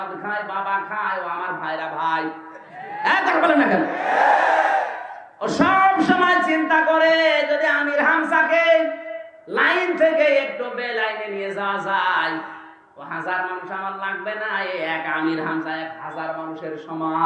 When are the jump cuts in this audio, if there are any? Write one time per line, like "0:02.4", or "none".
none